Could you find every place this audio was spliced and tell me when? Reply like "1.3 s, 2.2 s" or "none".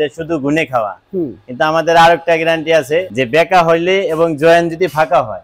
3.1 s